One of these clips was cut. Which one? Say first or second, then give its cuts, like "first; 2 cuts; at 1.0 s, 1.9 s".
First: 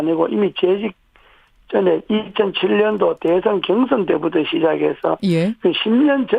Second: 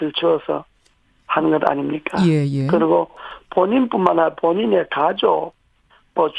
first; 1 cut; at 3.8 s